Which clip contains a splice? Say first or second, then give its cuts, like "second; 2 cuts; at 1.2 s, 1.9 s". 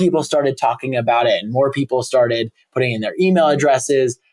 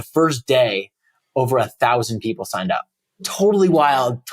second; 1 cut; at 3.3 s